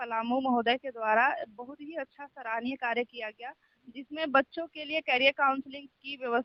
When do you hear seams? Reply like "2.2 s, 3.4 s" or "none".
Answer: none